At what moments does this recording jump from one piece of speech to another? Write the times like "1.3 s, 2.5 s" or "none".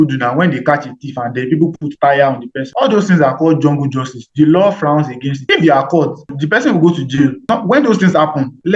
none